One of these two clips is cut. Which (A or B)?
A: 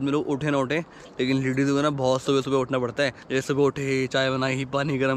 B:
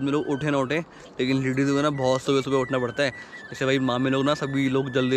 A